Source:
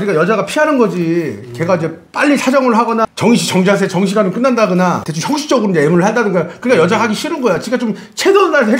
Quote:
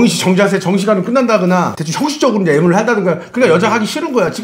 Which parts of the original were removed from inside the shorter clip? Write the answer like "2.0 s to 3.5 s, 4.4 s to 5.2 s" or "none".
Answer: none